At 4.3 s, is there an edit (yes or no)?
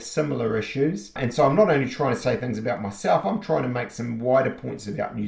no